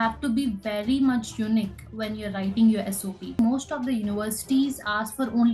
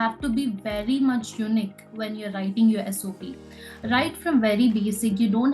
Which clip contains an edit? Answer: first; 1 cut; at 3.4 s

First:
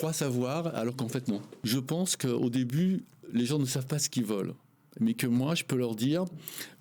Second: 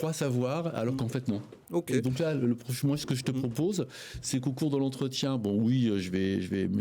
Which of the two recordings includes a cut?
first; 1 cut; at 1.5 s

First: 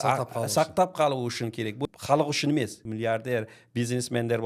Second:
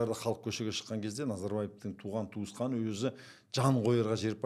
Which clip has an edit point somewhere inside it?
first; 2 cuts; at 1.8 s, 2.8 s

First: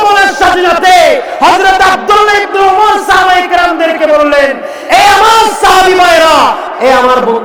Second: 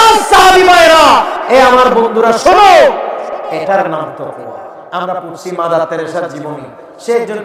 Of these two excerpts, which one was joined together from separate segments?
second; 1 cut; at 4.8 s

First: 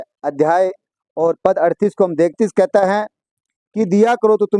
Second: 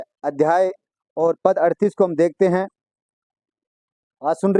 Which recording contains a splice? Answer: first; 1 cut; at 2.3 s

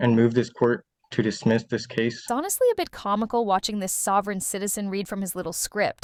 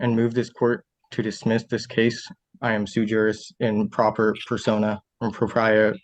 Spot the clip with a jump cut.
second; 1 cut; at 2.2 s

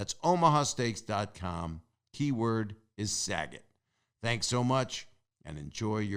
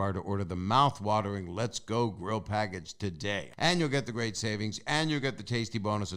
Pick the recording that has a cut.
second; 1 cut; at 3.5 s

